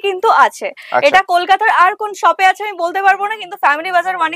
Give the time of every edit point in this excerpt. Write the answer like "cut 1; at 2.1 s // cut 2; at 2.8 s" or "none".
none